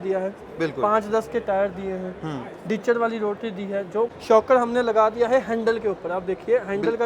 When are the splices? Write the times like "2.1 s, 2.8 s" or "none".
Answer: 4.2 s